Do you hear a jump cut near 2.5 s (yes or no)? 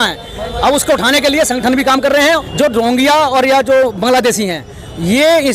yes